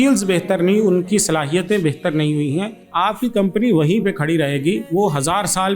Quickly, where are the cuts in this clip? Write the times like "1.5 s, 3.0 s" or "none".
2.8 s, 4.8 s